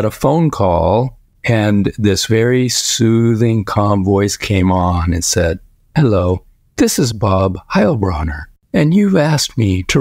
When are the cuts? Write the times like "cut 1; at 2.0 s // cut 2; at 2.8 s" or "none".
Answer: cut 1; at 1.3 s // cut 2; at 8.6 s